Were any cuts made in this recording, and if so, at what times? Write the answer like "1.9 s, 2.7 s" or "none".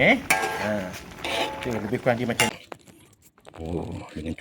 2.5 s